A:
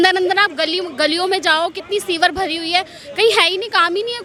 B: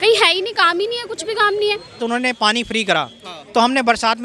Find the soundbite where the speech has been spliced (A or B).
B